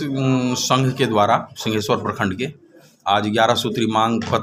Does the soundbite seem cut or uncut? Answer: uncut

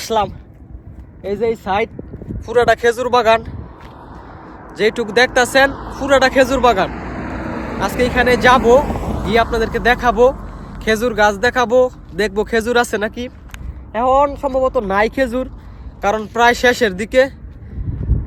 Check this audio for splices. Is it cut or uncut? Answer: uncut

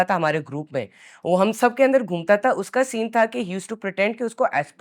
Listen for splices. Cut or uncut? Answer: uncut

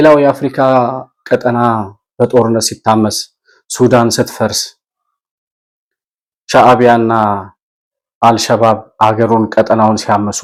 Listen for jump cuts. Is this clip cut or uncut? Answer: uncut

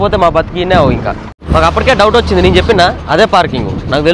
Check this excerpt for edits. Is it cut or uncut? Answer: cut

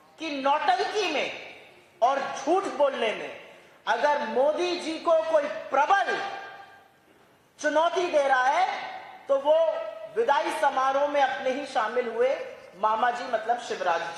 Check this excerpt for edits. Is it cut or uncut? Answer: uncut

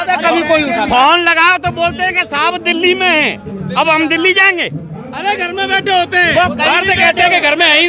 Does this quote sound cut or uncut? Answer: uncut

